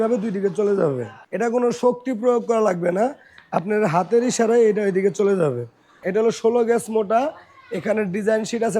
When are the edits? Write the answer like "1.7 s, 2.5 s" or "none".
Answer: 1.1 s, 6.0 s